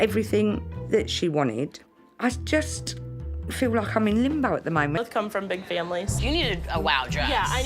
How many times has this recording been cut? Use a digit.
1